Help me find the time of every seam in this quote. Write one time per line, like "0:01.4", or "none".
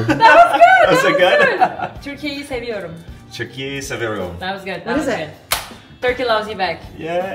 0:05.9